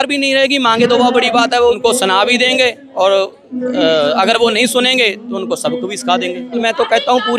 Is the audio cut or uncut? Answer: cut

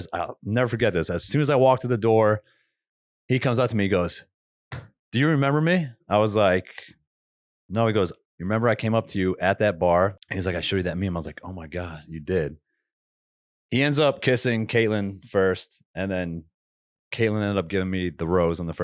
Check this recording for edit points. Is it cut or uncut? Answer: cut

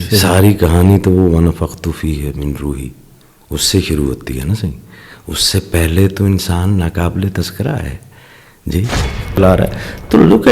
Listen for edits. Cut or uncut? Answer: cut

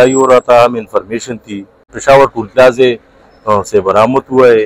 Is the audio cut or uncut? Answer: cut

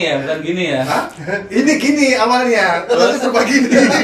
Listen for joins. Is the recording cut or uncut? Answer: uncut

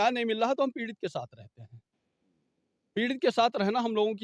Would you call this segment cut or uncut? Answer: uncut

